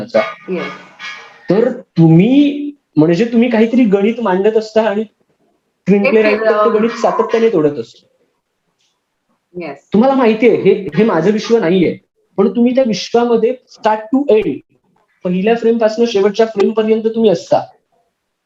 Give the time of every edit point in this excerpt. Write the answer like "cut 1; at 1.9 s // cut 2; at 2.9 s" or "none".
none